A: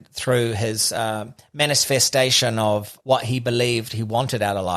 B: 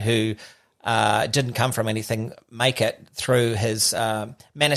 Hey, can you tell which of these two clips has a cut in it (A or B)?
A